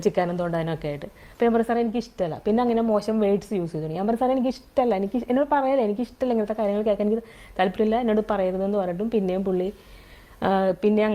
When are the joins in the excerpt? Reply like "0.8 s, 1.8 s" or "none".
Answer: none